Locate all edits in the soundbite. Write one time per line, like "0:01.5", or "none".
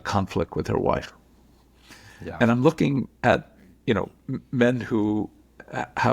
none